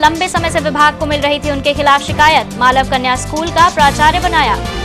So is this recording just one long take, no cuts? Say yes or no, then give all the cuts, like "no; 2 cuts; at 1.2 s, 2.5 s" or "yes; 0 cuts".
yes; 0 cuts